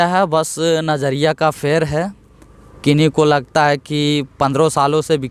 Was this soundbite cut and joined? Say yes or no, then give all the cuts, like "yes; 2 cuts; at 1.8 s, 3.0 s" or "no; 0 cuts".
no; 0 cuts